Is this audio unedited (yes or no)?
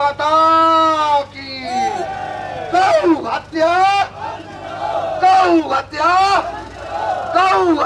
yes